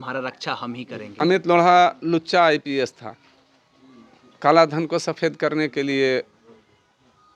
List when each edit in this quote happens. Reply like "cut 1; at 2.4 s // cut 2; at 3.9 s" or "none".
cut 1; at 1.2 s